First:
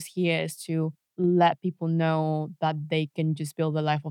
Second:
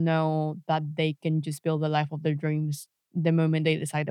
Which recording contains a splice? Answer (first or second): first